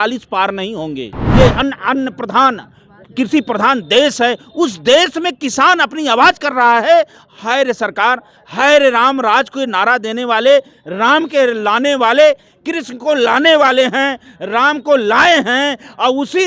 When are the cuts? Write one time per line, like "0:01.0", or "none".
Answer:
0:01.2